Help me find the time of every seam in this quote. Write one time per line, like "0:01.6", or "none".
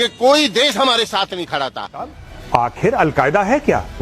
0:02.2